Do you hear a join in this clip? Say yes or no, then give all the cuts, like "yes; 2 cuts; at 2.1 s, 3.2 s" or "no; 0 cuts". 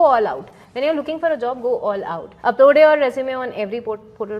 yes; 1 cut; at 2.3 s